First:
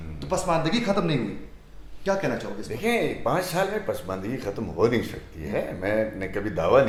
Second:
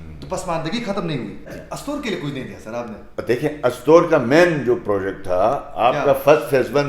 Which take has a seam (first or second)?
second